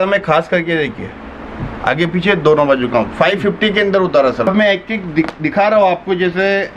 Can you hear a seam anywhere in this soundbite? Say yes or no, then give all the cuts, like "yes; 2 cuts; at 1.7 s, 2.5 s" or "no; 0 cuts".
yes; 1 cut; at 4.5 s